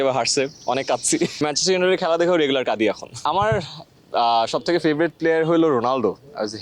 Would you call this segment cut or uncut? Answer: cut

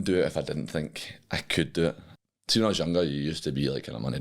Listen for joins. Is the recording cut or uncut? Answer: cut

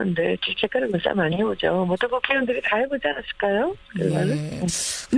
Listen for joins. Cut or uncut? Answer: uncut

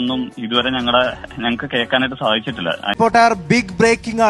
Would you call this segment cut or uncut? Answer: cut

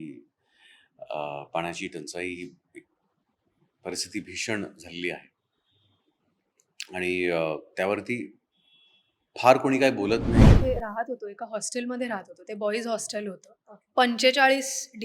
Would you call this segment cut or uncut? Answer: cut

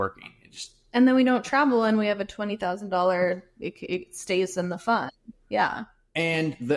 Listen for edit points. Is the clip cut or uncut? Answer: uncut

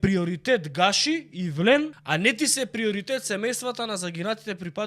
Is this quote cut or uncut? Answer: cut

